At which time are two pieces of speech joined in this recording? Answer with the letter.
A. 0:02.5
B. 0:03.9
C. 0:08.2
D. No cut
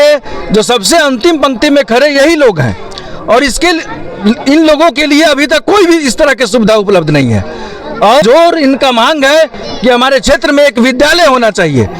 C